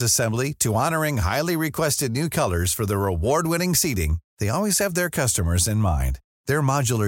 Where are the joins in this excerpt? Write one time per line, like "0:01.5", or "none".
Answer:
none